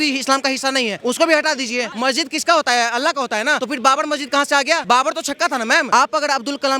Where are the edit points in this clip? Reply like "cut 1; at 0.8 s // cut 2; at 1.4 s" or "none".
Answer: cut 1; at 1.0 s // cut 2; at 1.9 s // cut 3; at 3.6 s // cut 4; at 4.8 s // cut 5; at 5.9 s